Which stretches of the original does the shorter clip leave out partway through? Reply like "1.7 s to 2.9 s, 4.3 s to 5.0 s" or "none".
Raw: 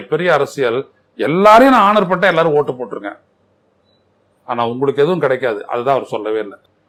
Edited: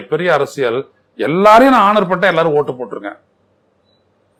none